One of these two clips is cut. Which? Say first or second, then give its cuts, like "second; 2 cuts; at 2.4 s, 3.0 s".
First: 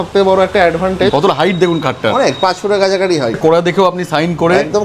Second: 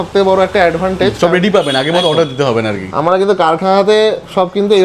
first; 2 cuts; at 1.1 s, 3.4 s